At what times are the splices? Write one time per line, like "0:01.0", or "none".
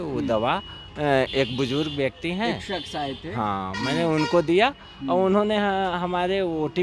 none